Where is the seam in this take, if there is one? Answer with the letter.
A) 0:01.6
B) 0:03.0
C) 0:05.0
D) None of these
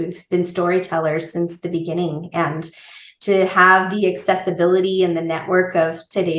D